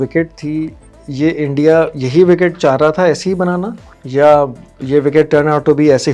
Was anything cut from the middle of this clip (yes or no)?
no